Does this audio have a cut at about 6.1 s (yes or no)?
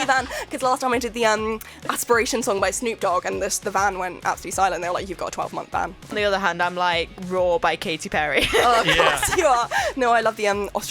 yes